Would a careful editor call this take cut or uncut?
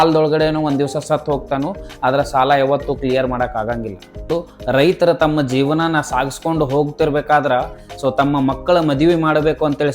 cut